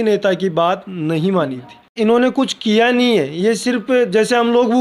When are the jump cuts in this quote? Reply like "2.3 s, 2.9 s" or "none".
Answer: 1.9 s